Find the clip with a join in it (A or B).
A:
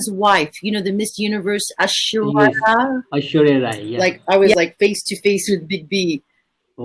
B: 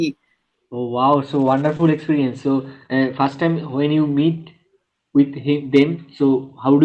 A